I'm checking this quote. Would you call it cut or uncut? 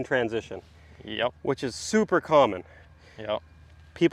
uncut